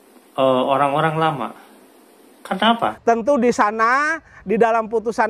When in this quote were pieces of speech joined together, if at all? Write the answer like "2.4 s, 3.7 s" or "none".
3.0 s